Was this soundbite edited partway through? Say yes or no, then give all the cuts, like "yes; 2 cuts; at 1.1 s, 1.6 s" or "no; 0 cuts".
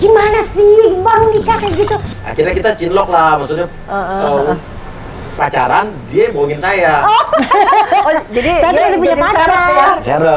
yes; 1 cut; at 2.2 s